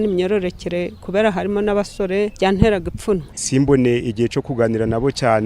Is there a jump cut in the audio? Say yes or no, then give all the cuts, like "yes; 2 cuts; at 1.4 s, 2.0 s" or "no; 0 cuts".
yes; 2 cuts; at 2.3 s, 3.3 s